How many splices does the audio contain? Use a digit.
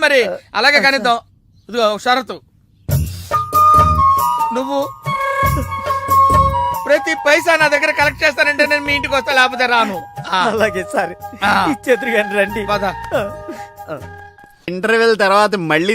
1